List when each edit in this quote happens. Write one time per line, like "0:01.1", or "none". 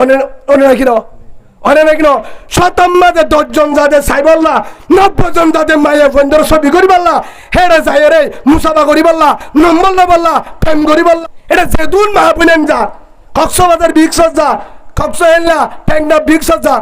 0:11.2